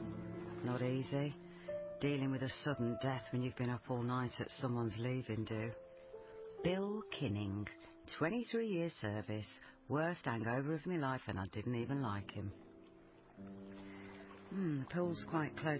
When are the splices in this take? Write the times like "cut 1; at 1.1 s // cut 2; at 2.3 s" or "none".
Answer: cut 1; at 13.3 s

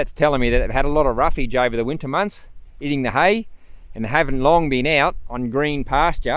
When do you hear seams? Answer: none

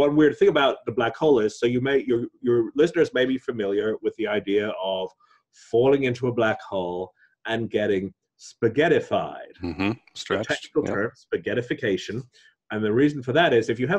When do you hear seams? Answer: none

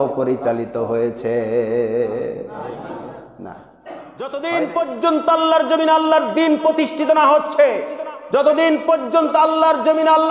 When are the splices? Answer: cut 1; at 4.3 s

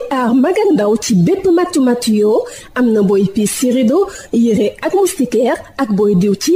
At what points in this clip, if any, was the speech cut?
none

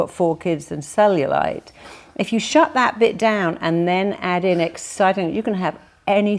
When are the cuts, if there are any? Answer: none

